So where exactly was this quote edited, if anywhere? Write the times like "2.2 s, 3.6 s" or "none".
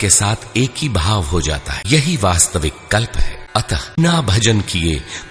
1.7 s, 4.0 s